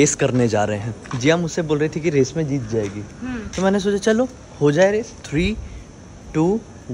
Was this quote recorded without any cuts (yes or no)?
no